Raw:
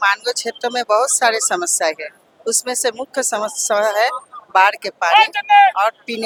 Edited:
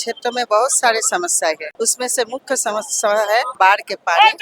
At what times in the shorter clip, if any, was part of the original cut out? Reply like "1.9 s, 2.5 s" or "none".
1.7 s, 3.5 s